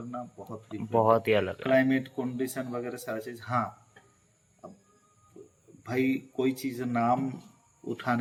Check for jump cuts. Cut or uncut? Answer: uncut